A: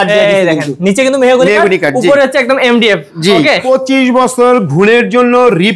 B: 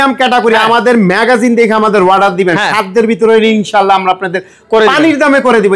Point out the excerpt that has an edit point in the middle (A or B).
A